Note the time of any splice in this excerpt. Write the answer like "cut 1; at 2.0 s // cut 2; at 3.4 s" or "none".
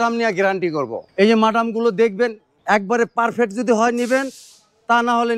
cut 1; at 1.0 s // cut 2; at 2.5 s